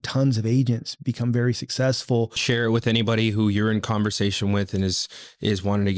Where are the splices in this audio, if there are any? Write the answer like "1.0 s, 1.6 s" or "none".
2.4 s